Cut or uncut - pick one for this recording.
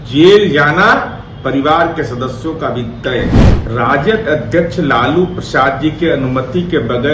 cut